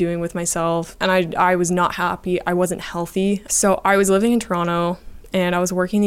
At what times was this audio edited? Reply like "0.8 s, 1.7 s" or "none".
0.9 s, 3.5 s